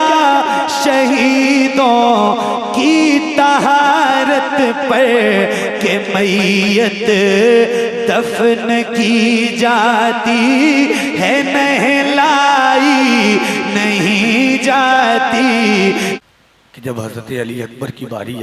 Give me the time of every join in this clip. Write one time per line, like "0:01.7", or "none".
0:16.2